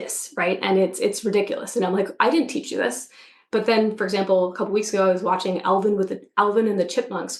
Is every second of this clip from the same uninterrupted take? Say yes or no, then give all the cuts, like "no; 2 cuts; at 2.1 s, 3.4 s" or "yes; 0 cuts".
yes; 0 cuts